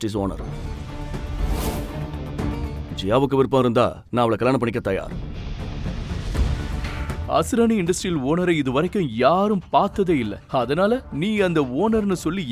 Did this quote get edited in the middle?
yes; 2 cuts; at 2.9 s, 7.2 s

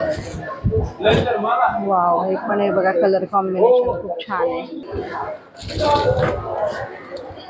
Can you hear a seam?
yes; 1 cut; at 4.7 s

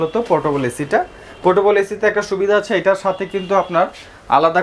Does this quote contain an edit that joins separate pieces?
no; 0 cuts

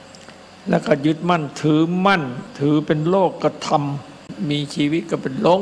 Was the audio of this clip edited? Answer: yes; 2 cuts; at 2.5 s, 4.3 s

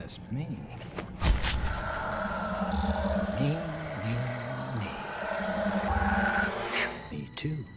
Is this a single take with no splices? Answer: yes; 0 cuts

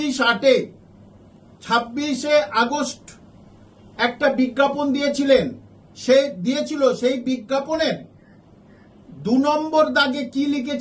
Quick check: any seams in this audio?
no; 0 cuts

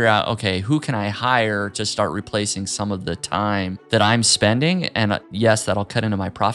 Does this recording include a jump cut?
yes; 2 cuts; at 3.8 s, 5.3 s

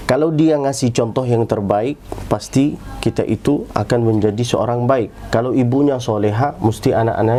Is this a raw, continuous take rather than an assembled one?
yes; 0 cuts

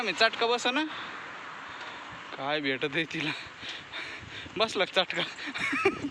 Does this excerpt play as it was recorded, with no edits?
yes; 0 cuts

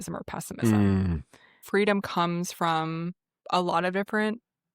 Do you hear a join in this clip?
yes; 2 cuts; at 1.6 s, 3.3 s

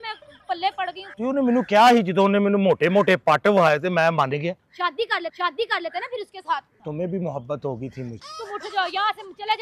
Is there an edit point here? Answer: yes; 3 cuts; at 1.0 s, 6.7 s, 8.3 s

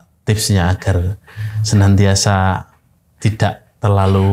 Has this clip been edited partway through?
no; 0 cuts

